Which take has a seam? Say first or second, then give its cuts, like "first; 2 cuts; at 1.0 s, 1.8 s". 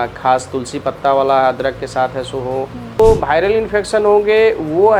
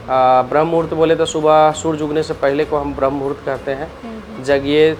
first; 1 cut; at 3.0 s